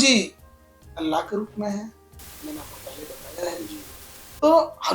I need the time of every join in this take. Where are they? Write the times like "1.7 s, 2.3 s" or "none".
none